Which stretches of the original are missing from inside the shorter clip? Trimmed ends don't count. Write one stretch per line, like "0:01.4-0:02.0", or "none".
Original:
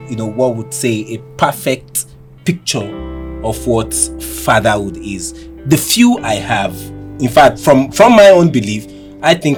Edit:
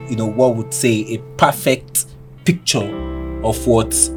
none